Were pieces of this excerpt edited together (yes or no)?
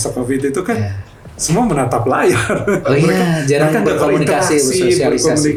no